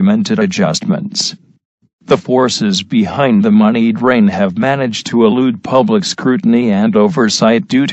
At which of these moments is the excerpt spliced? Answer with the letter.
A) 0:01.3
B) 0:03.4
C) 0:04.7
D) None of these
A